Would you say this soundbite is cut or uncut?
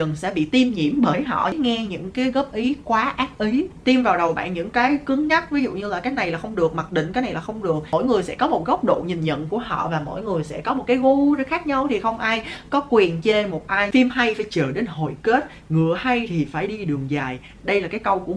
cut